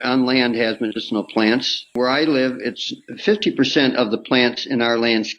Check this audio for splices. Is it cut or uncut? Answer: cut